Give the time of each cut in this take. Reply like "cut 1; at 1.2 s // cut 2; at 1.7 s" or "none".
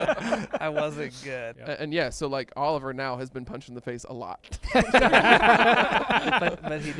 cut 1; at 1.5 s